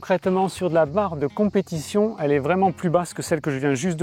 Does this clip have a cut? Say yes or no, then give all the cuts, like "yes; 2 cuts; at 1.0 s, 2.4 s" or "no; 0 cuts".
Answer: no; 0 cuts